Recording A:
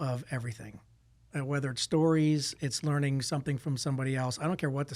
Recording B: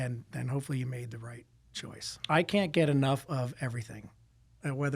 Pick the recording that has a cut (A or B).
B